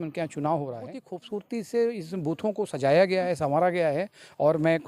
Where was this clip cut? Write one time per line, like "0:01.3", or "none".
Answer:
0:01.1